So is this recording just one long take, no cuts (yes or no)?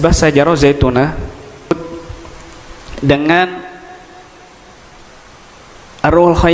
no